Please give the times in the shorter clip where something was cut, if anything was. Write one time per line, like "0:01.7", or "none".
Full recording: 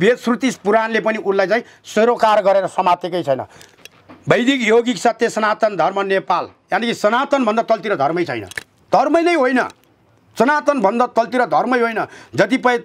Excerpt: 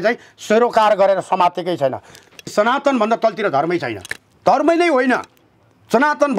0:02.4